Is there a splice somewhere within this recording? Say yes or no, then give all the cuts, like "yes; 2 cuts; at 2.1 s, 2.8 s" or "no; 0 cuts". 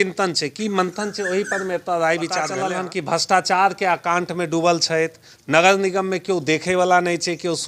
yes; 1 cut; at 2.6 s